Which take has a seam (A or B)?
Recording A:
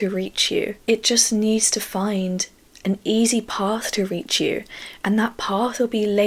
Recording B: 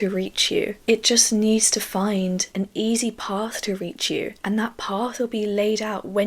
B